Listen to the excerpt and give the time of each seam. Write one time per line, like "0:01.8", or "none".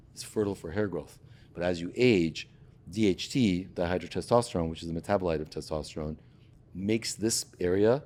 none

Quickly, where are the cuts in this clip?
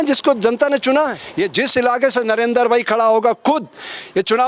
0:01.2

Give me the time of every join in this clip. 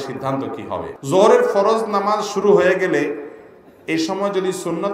0:00.9

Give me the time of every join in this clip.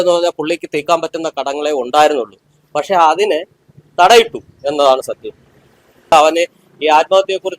0:06.1

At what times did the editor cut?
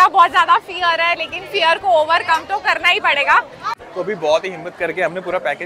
0:03.8

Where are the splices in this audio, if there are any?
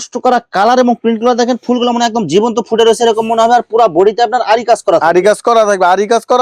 none

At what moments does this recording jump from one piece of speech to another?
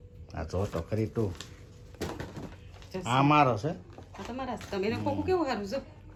none

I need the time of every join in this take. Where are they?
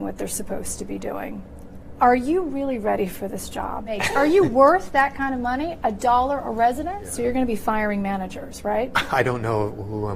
0:04.0
0:07.0

